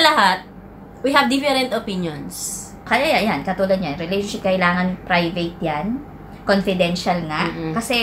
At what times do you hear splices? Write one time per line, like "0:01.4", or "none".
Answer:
0:02.9